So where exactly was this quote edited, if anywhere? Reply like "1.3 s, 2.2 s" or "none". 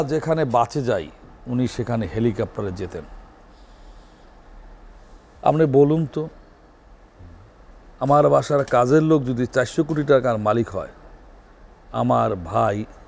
none